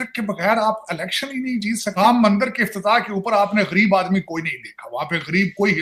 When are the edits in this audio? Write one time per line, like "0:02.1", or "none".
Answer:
none